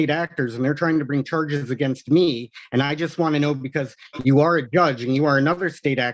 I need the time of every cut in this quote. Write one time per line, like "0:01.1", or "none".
none